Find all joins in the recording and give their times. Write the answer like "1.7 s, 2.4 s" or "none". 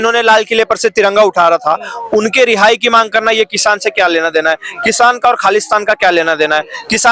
none

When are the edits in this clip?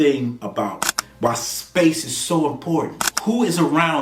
3.0 s

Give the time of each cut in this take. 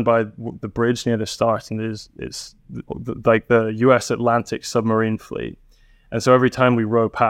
none

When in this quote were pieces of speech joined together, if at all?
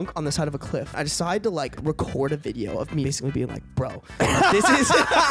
1.0 s, 1.8 s, 3.0 s

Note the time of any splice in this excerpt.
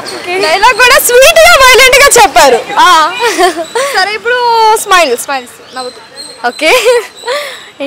none

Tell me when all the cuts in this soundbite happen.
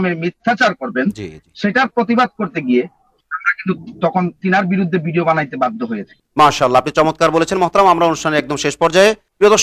none

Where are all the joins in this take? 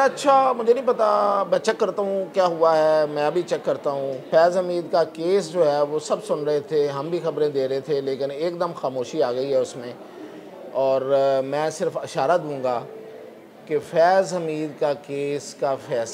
4.2 s

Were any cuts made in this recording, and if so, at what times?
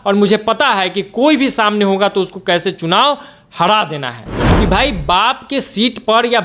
4.3 s

